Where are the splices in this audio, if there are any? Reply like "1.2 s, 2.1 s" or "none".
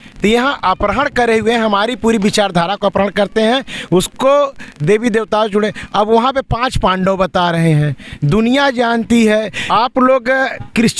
9.6 s